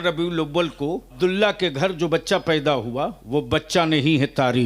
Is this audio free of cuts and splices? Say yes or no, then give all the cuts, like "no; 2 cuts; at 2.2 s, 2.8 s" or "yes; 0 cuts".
no; 2 cuts; at 1.1 s, 3.2 s